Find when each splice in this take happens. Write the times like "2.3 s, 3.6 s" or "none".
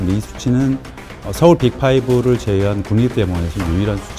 1.2 s